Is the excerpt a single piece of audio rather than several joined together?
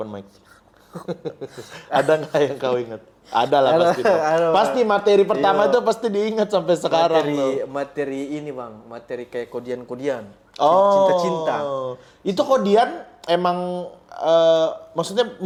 yes; 0 cuts

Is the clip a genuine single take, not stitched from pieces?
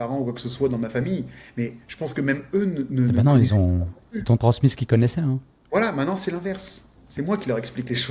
yes; 0 cuts

